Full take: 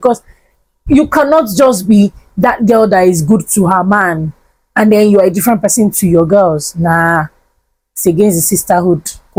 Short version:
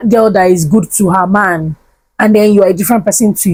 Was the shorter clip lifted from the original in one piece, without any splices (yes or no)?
yes